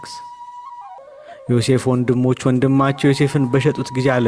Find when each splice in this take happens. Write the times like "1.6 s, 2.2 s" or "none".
1.0 s